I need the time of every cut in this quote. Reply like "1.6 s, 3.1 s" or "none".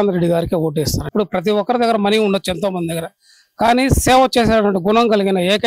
1.1 s

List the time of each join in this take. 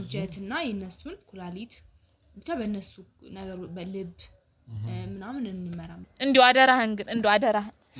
6.1 s

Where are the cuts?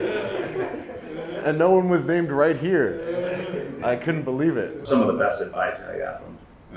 1.4 s, 4.8 s

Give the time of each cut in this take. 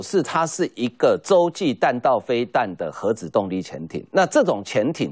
none

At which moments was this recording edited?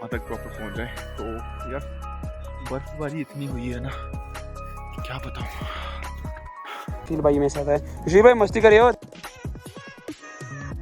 7.0 s

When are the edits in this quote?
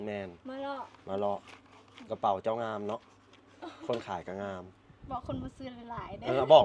none

